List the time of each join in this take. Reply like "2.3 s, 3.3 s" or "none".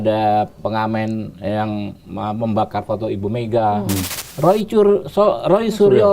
4.2 s